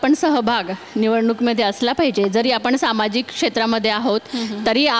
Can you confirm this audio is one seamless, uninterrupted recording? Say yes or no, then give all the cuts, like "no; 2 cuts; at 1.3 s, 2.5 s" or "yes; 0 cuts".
yes; 0 cuts